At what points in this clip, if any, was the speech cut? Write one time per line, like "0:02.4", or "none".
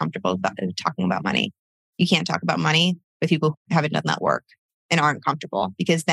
0:03.5